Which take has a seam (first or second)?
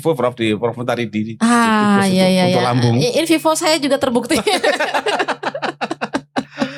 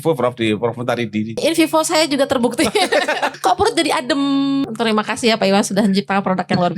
second